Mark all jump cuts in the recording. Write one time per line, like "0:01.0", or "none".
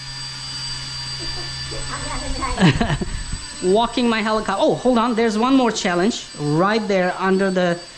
none